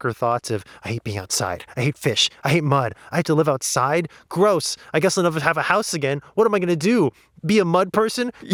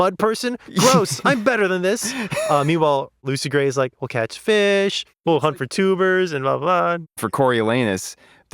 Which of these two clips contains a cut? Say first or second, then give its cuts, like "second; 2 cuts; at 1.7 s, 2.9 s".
second; 2 cuts; at 5.2 s, 7.0 s